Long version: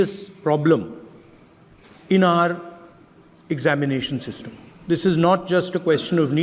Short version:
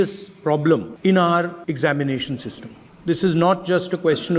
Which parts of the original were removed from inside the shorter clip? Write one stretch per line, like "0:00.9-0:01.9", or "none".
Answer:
0:00.9-0:02.0
0:02.6-0:03.4